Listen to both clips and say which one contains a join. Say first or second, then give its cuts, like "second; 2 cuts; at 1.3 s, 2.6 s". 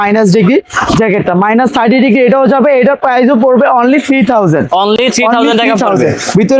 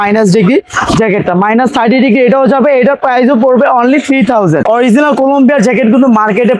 second; 1 cut; at 4.6 s